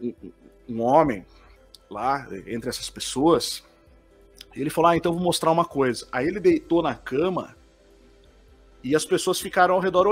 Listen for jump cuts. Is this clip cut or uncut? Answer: uncut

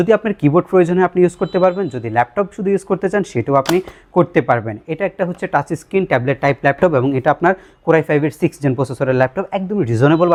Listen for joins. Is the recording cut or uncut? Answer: uncut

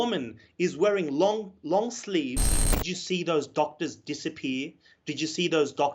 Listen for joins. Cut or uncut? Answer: cut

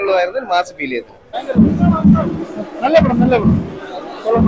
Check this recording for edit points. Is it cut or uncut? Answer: uncut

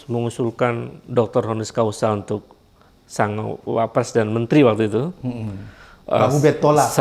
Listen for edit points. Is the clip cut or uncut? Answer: uncut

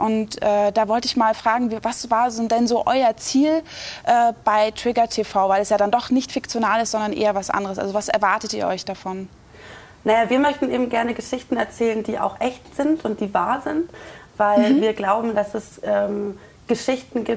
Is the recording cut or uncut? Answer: cut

